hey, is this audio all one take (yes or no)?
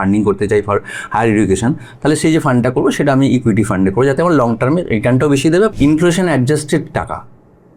no